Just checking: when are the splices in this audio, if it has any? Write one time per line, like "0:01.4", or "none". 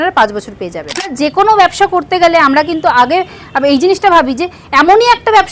0:01.1